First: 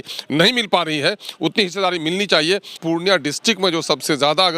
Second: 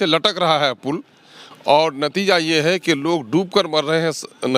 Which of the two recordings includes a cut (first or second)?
first